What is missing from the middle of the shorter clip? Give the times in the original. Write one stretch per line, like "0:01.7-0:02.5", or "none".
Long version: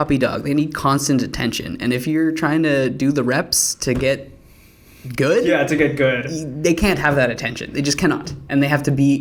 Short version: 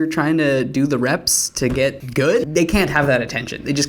0:04.6-0:06.4